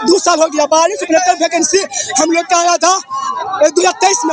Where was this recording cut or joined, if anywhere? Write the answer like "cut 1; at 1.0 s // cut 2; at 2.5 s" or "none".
none